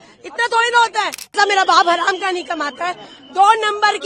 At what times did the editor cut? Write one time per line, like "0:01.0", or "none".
0:01.4